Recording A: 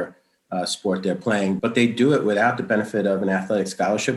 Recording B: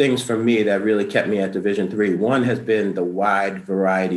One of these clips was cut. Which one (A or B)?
A